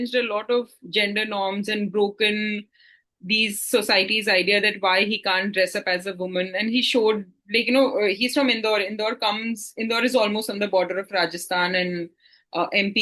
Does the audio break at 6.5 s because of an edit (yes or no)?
no